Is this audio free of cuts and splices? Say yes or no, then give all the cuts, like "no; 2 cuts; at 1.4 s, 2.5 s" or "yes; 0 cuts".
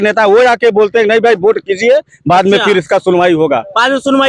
yes; 0 cuts